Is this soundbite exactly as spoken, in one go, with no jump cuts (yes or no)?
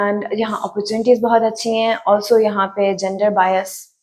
yes